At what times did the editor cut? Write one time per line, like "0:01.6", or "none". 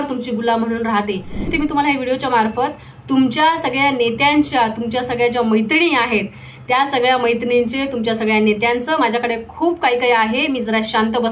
0:01.5